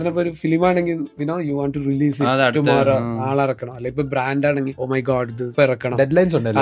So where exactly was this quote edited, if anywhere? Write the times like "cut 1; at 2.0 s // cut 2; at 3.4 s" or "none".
none